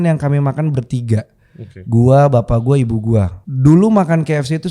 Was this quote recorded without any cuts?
no; 1 cut; at 3.4 s

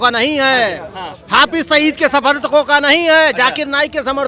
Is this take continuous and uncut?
yes; 0 cuts

